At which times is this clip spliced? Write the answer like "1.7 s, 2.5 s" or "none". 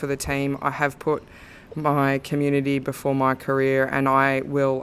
none